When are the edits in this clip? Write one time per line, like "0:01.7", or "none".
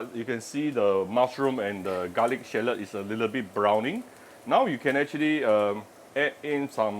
0:05.9